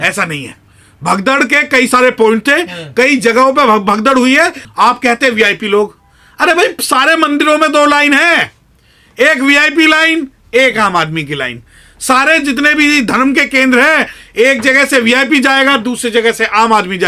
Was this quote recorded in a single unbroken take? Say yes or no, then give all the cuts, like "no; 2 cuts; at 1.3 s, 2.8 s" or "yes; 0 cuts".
no; 1 cut; at 4.6 s